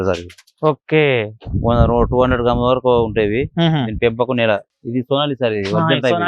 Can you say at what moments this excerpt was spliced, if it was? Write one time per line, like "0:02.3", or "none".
0:04.8